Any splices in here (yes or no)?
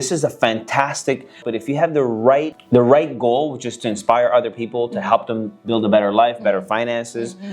yes